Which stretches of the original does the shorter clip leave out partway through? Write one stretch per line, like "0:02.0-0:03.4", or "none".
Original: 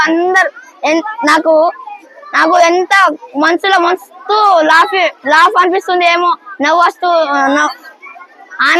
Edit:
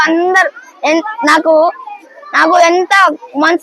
none